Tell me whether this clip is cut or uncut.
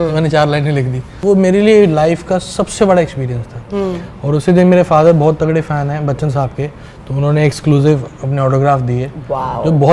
cut